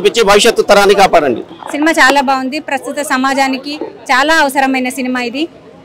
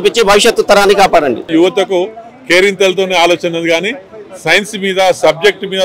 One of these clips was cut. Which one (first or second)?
second